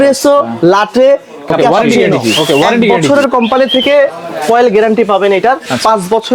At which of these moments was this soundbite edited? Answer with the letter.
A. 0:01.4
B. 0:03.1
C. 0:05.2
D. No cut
B